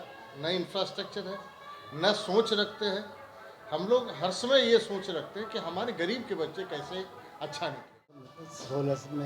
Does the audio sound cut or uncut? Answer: cut